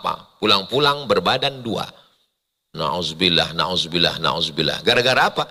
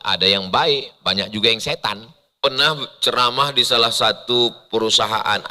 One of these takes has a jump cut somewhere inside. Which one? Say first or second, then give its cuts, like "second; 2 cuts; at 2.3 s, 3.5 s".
second; 1 cut; at 2.4 s